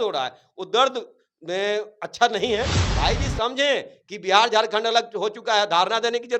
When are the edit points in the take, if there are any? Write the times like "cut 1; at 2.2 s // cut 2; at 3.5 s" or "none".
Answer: cut 1; at 2.8 s

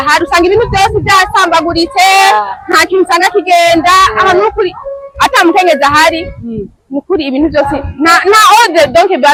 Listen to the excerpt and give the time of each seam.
none

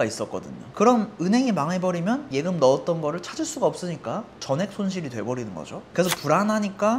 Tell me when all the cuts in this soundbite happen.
none

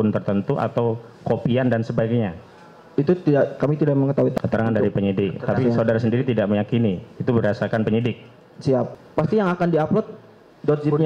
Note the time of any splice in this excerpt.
cut 1; at 4.3 s // cut 2; at 8.9 s

